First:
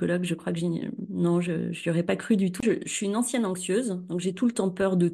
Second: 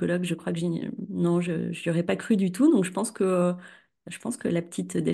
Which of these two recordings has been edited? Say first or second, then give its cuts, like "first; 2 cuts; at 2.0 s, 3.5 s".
first; 1 cut; at 2.6 s